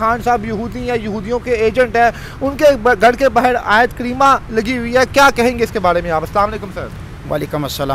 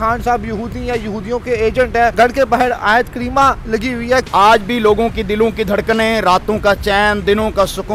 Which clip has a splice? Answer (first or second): second